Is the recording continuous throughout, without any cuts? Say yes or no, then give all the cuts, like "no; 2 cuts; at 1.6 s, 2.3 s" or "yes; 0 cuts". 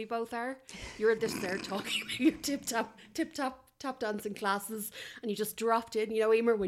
yes; 0 cuts